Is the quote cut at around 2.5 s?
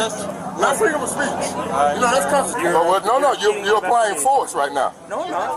yes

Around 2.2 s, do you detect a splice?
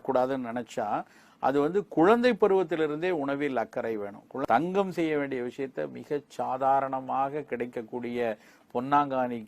no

